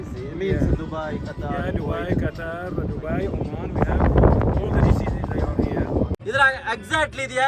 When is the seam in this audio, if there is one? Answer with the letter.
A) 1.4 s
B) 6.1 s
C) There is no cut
B